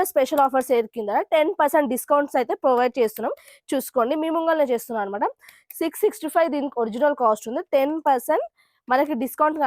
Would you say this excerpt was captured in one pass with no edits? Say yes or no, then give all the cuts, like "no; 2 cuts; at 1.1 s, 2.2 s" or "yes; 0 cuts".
yes; 0 cuts